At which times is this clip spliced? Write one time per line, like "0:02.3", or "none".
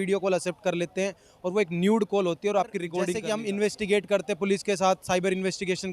0:03.2